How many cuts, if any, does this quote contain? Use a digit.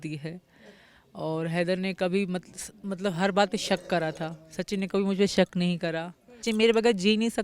1